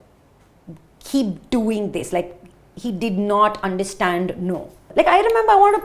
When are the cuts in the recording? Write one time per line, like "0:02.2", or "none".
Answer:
0:04.9